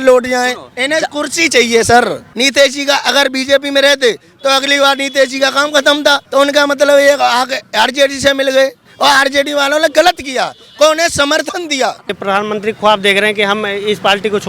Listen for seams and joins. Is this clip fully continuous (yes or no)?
no